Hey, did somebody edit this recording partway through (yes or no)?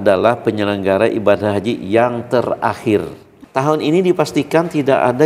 yes